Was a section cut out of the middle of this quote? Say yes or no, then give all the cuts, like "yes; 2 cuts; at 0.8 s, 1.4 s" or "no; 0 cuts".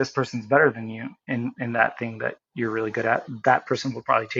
no; 0 cuts